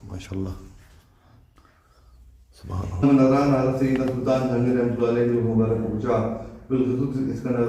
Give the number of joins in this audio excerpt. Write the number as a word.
one